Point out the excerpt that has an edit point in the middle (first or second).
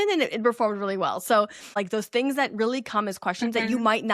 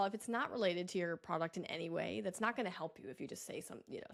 first